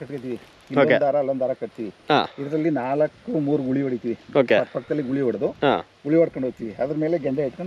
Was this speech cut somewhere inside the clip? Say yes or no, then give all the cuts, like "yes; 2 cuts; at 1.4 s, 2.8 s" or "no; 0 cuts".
no; 0 cuts